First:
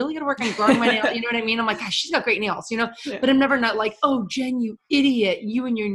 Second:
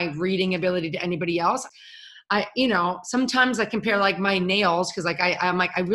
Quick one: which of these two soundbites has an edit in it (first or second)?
second